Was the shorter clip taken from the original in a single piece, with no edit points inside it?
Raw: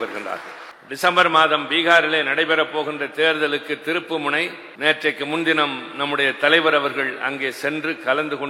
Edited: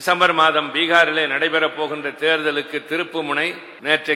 yes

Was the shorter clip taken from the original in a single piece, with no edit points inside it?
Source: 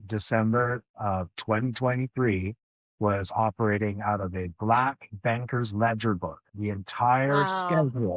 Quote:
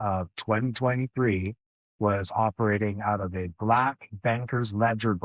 yes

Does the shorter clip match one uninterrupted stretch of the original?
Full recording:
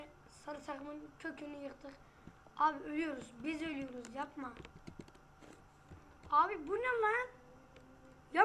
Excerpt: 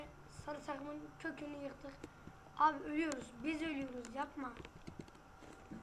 yes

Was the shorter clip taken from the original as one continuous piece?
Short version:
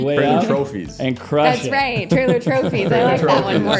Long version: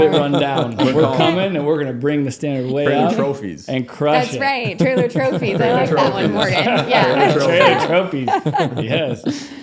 yes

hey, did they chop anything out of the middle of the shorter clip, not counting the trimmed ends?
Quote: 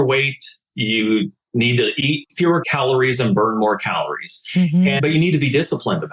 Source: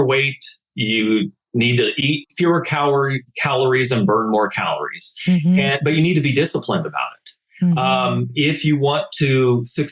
yes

